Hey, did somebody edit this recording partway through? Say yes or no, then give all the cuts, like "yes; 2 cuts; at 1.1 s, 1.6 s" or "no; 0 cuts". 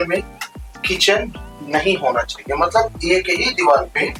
no; 0 cuts